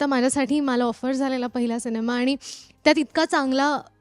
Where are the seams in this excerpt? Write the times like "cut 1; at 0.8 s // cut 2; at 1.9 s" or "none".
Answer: none